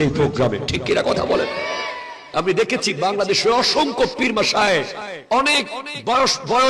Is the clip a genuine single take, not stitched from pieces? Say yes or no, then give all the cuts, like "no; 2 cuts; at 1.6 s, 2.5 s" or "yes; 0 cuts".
no; 1 cut; at 2.3 s